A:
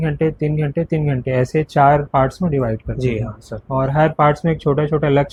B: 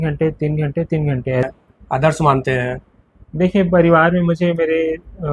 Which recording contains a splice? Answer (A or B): B